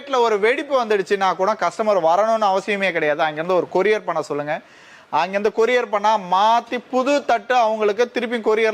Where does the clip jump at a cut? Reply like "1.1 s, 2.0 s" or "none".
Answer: none